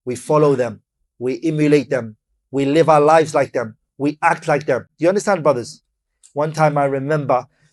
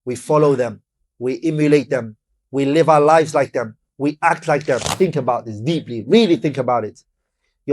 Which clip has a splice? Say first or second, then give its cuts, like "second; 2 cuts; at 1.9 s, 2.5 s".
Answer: second; 1 cut; at 4.9 s